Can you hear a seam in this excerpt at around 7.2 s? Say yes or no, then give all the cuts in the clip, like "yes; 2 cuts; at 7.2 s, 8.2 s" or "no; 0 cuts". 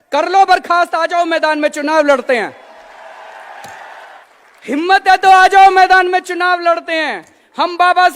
no; 1 cut; at 4.2 s